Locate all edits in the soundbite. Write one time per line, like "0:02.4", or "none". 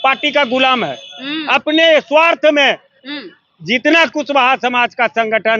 none